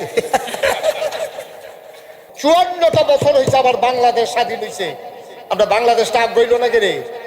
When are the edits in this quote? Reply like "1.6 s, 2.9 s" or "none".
2.2 s